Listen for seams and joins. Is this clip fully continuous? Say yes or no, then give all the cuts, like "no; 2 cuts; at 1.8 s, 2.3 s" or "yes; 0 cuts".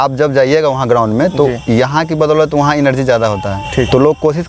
yes; 0 cuts